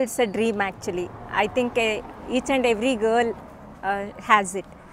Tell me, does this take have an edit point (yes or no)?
no